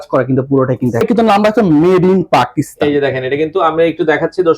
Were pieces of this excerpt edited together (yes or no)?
yes